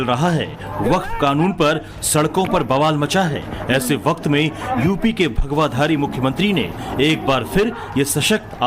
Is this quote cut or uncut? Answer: cut